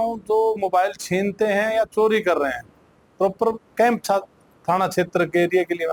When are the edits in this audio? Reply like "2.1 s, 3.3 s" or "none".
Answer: none